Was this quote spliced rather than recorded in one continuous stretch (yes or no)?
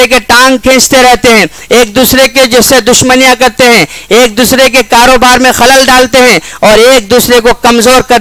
no